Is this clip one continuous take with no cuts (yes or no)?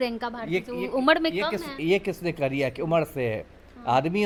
yes